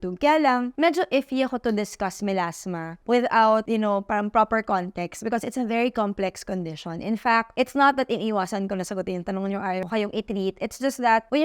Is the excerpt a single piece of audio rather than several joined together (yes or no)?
yes